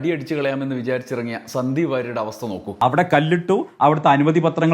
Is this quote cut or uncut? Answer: cut